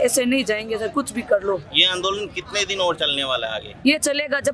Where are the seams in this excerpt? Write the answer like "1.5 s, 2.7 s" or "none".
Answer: none

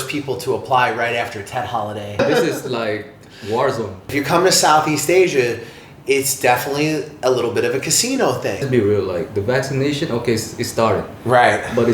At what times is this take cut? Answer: 2.2 s, 4.1 s, 8.7 s

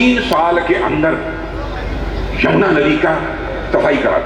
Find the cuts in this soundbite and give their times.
none

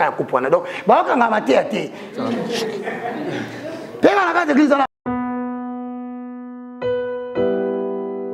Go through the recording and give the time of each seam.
4.9 s

